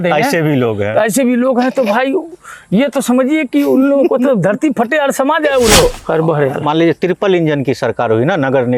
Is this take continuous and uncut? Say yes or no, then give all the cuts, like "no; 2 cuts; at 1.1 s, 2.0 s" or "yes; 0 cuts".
no; 1 cut; at 5.8 s